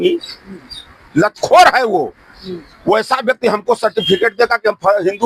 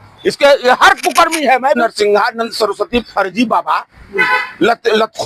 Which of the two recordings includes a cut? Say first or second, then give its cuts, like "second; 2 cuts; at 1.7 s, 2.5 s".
second; 1 cut; at 1.8 s